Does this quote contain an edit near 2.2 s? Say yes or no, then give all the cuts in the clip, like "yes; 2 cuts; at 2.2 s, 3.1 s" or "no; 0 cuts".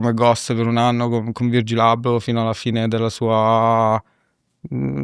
no; 0 cuts